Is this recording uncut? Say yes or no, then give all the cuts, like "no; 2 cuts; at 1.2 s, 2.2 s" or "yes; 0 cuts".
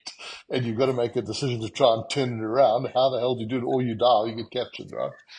yes; 0 cuts